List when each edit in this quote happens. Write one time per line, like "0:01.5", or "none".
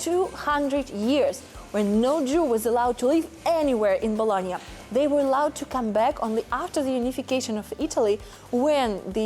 none